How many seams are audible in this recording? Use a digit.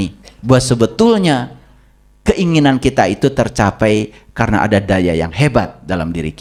0